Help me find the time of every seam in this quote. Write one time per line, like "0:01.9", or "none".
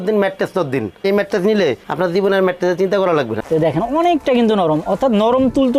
0:01.0
0:03.4